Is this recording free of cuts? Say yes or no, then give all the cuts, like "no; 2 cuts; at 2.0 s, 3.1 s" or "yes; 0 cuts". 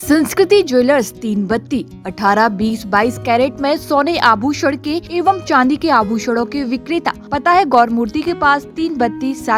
no; 2 cuts; at 5.0 s, 7.2 s